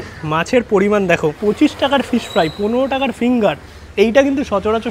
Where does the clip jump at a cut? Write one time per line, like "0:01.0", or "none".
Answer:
0:01.4